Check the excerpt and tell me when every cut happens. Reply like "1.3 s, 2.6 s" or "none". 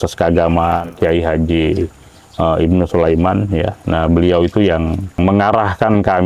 0.9 s, 5.2 s

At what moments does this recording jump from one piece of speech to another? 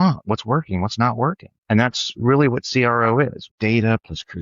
1.5 s, 3.4 s

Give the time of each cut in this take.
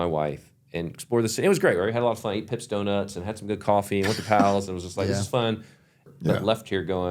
6.0 s

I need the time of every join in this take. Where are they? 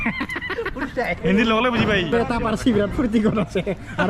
2.1 s

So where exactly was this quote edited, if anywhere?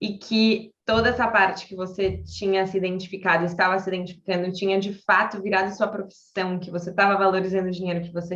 none

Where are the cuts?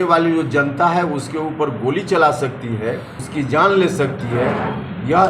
3.2 s

